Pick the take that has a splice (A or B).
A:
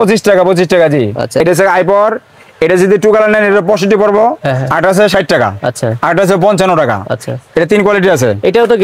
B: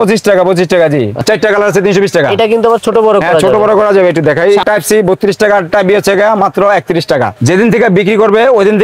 B